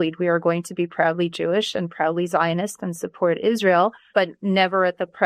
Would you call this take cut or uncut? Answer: cut